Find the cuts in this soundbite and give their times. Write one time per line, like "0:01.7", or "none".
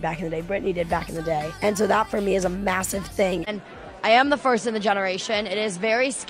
0:03.5

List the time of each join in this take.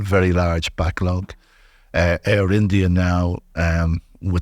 none

